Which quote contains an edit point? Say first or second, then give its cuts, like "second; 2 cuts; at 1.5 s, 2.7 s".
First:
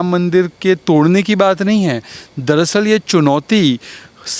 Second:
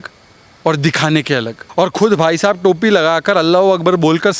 second; 1 cut; at 1.6 s